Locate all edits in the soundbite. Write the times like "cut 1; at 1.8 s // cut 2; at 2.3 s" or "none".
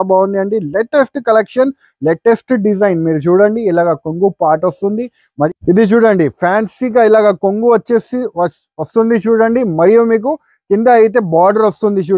cut 1; at 5.5 s